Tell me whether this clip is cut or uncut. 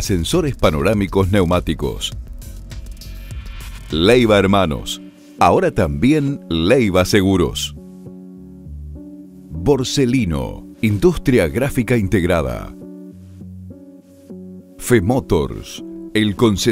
cut